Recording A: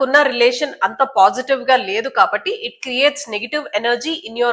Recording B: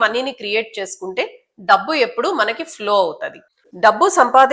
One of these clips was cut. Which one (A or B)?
B